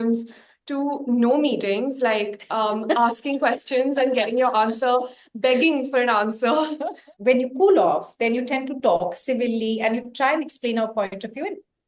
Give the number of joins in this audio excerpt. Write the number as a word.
one